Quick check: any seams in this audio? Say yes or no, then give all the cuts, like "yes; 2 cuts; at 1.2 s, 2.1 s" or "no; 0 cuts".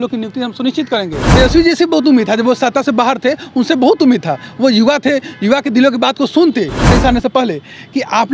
yes; 2 cuts; at 1.2 s, 6.9 s